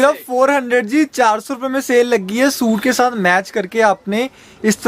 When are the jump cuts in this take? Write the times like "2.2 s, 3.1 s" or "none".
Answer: none